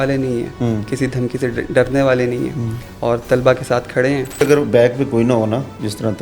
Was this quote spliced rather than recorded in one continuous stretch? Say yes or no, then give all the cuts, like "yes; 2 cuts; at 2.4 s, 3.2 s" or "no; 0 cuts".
yes; 1 cut; at 4.4 s